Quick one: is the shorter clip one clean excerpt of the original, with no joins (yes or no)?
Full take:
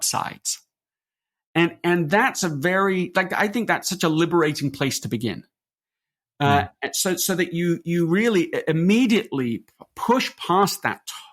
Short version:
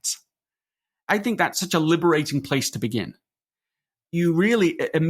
no